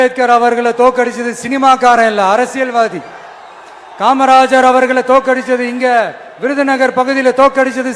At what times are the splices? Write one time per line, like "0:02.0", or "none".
none

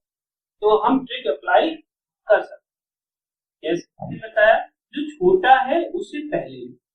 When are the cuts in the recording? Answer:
0:04.2

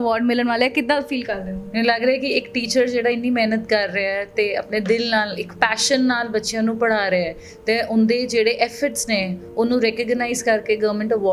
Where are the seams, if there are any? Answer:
0:01.6

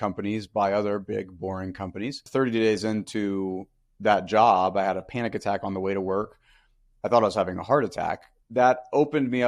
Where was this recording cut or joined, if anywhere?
0:02.2
0:08.3

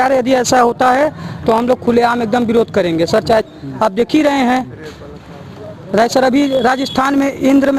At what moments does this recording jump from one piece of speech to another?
0:03.4

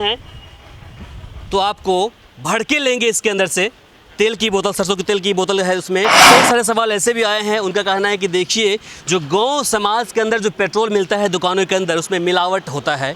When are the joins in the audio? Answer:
0:06.2

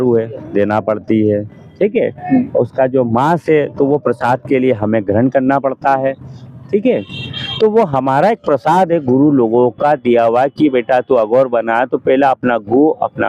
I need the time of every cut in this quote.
none

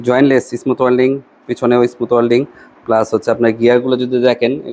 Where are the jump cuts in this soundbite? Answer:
none

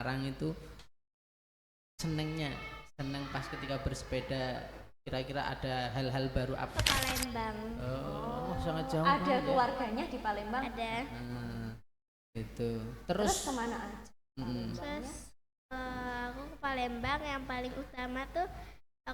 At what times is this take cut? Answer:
0:06.7

